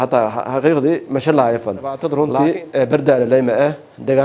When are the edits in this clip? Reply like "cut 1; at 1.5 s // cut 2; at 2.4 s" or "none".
cut 1; at 2.0 s